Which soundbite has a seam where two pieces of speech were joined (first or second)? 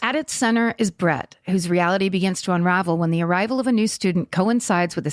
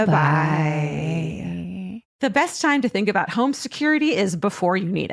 second